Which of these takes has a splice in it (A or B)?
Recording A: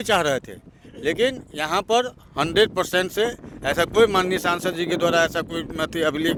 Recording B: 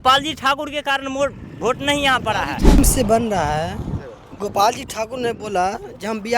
B